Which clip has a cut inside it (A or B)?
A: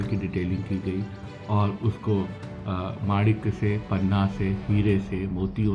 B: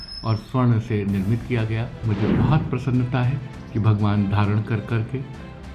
B